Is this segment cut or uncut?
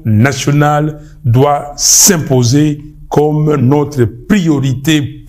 uncut